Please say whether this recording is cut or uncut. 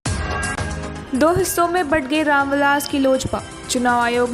uncut